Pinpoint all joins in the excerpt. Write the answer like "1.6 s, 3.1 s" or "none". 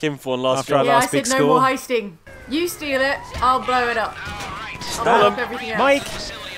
2.2 s